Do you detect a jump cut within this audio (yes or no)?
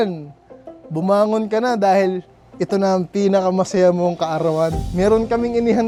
no